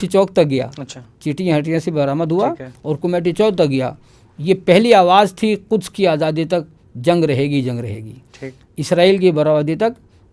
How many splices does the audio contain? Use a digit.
0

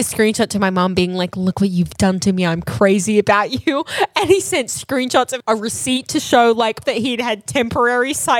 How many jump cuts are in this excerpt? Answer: 2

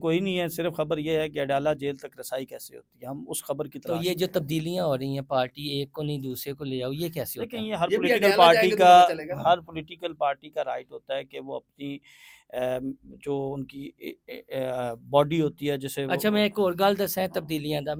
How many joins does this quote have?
0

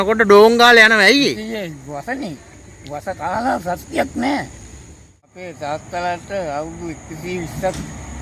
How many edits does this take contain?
1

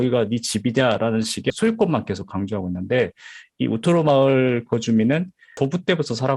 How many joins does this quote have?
2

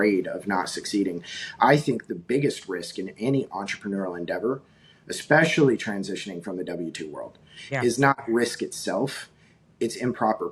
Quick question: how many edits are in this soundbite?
0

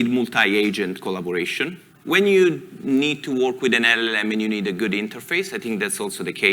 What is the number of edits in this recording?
1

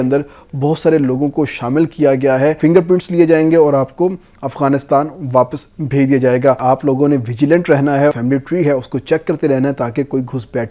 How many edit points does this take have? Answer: 3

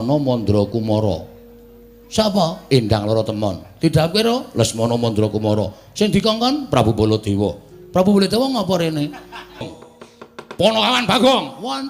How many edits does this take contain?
1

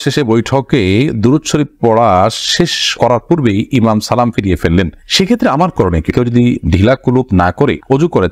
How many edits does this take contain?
1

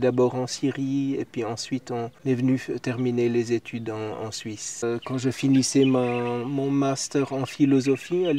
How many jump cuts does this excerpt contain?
1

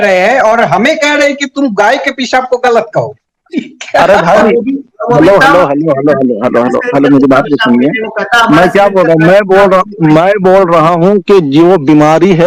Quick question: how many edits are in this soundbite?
0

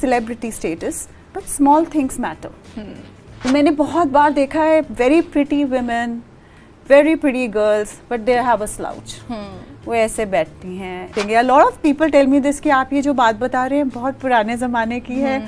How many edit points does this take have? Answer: 2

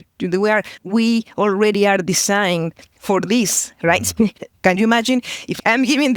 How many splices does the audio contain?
1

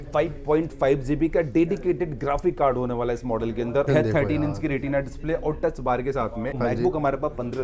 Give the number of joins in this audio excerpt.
2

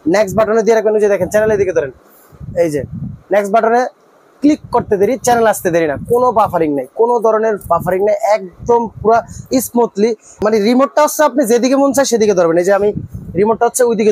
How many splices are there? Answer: 1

